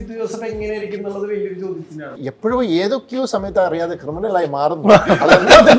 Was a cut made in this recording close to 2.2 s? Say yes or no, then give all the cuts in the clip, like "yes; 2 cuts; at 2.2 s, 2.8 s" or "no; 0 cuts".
yes; 1 cut; at 2.2 s